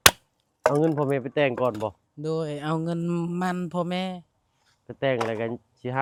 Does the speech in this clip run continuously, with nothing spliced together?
yes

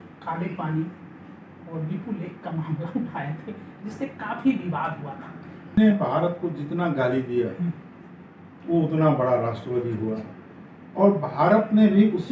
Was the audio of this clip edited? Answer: yes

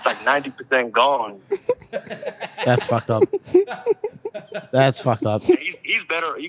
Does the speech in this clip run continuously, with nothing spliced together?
yes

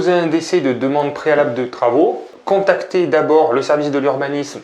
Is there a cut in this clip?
yes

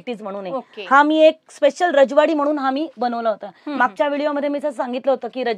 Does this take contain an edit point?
no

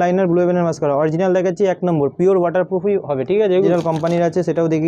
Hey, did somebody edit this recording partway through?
yes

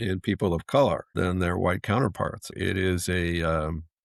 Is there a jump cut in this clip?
yes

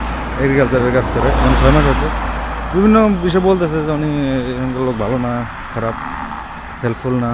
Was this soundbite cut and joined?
no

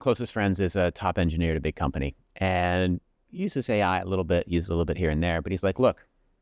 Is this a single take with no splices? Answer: yes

